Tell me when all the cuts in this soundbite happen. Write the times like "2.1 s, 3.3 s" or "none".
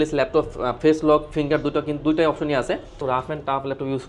3.0 s